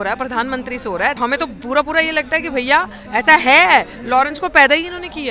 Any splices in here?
yes; 1 cut; at 1.2 s

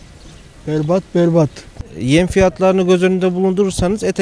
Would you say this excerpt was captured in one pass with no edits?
yes; 0 cuts

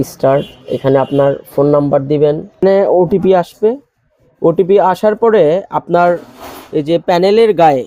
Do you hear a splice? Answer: yes; 1 cut; at 2.6 s

